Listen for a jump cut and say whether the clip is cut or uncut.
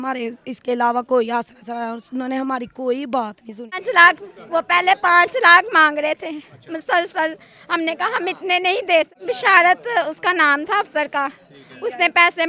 cut